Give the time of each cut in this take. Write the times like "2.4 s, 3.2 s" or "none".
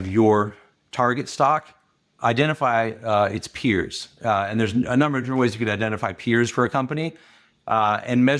none